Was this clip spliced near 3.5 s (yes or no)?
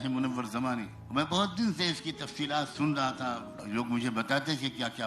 yes